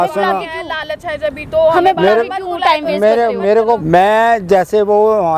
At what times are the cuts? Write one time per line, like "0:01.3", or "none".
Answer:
0:03.8